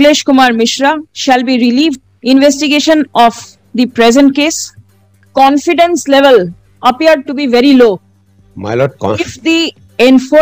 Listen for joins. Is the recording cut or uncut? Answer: cut